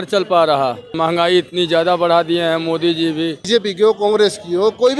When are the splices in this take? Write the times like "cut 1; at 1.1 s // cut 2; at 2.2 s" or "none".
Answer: cut 1; at 0.9 s // cut 2; at 3.4 s